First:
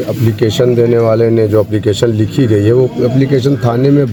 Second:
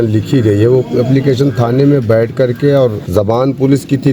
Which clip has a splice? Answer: second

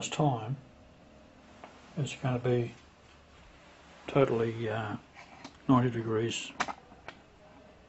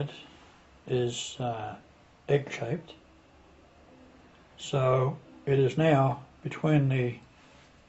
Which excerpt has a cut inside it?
second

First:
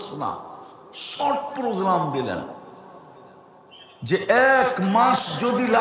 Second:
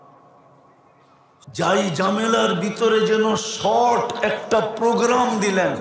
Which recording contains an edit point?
second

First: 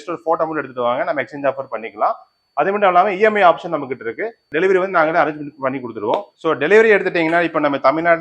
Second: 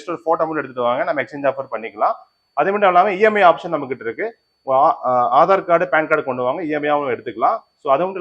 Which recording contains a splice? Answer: first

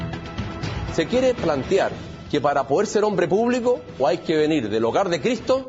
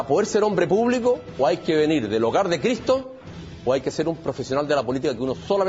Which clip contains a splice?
first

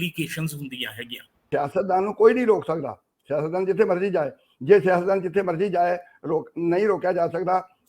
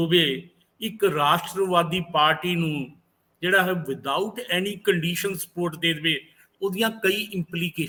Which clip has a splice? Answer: first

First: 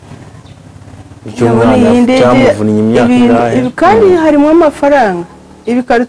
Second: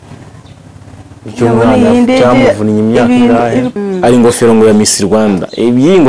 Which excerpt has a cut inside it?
second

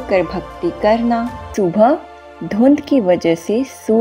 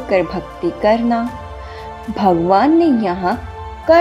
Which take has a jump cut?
first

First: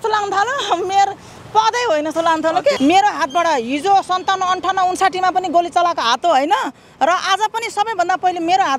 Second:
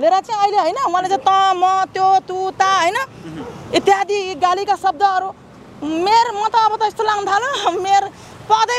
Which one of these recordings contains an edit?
first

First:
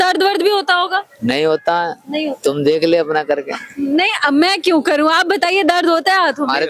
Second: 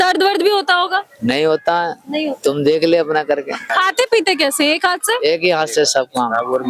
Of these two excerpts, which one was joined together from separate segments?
second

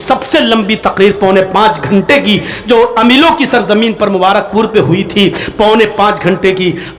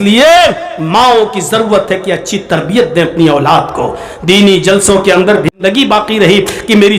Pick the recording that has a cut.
second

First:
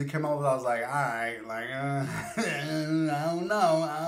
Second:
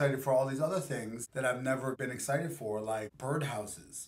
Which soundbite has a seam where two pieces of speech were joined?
second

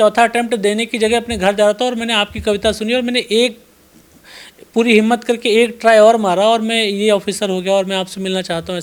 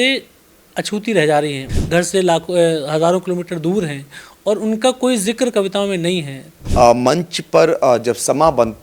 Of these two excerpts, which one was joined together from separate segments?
second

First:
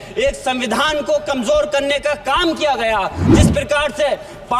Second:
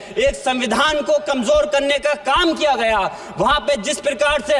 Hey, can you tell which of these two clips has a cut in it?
first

